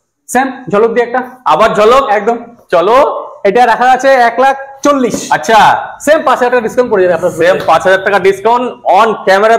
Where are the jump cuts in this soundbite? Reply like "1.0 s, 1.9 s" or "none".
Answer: none